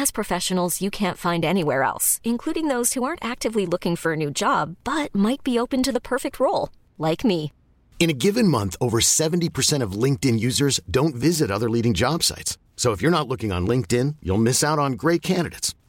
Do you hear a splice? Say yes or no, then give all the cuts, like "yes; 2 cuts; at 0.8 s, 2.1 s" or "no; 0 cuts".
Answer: no; 0 cuts